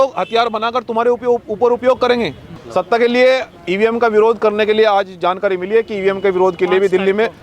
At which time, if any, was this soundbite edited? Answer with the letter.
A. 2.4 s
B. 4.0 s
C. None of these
A